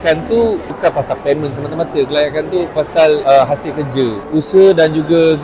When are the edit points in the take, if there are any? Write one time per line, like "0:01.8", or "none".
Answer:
0:04.2